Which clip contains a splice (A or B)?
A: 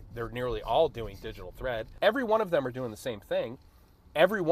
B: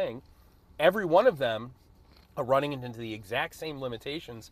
A